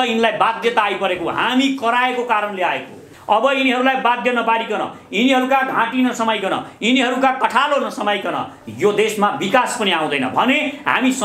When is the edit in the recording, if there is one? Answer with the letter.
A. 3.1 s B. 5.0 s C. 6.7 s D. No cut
A